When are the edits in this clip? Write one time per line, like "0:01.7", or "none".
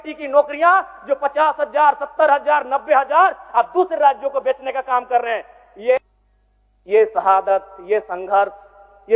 0:06.0